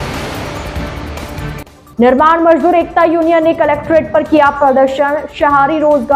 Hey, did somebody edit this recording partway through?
no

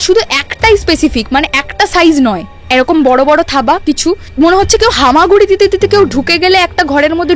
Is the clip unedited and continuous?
no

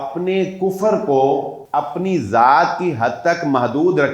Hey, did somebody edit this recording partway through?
yes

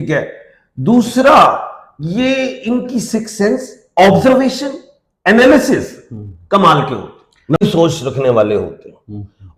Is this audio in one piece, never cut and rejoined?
no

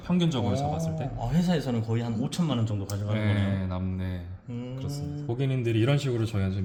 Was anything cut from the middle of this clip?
no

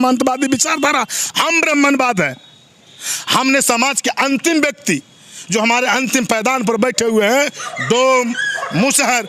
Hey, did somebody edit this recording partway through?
no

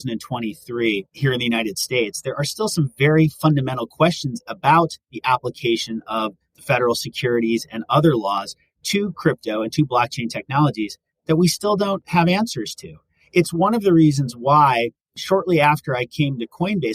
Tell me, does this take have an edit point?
yes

